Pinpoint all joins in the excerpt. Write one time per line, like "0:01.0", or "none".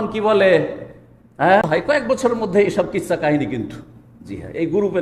0:01.7